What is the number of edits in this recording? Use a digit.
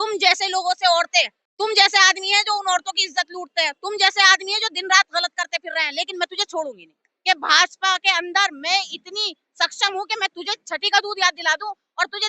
2